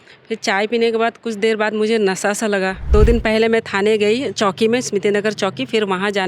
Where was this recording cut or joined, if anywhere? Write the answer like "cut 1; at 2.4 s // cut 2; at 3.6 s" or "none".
cut 1; at 2.9 s